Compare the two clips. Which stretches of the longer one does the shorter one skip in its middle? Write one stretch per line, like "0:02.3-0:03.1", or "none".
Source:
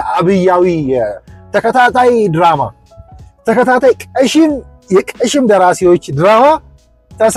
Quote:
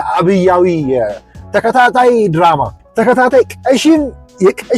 0:02.8-0:03.3